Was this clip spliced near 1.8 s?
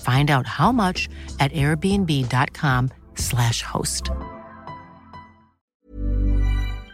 no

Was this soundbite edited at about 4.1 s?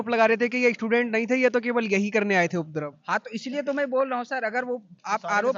no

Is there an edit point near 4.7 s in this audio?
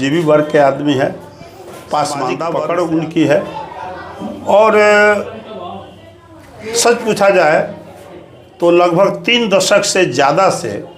no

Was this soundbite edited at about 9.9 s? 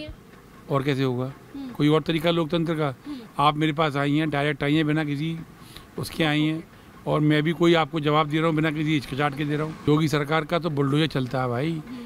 yes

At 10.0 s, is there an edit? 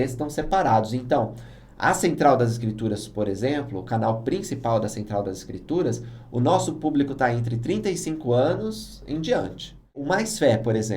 yes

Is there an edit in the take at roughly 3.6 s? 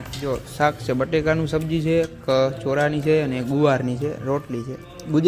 no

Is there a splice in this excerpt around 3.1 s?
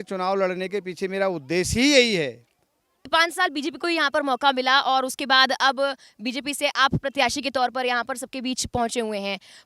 yes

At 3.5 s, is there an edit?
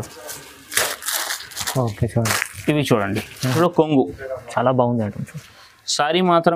yes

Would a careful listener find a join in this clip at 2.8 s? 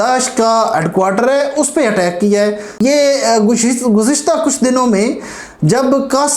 yes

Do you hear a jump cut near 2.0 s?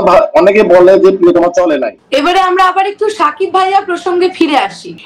yes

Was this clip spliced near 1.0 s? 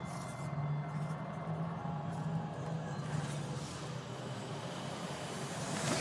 no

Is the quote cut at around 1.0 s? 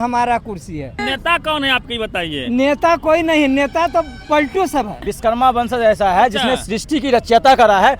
yes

